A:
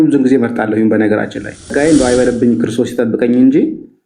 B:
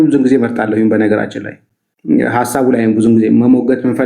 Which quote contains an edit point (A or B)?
A